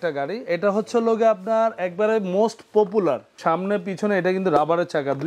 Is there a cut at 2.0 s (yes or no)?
no